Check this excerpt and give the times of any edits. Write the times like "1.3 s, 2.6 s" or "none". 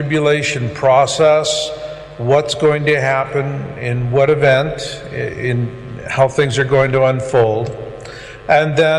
none